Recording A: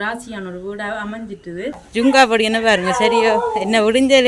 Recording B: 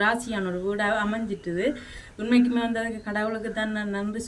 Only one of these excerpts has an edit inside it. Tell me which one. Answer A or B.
A